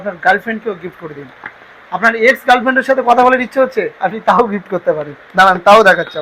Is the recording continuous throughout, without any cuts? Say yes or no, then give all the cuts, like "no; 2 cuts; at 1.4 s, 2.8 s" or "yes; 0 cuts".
yes; 0 cuts